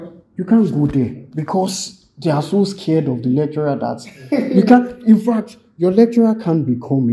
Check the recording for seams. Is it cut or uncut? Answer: uncut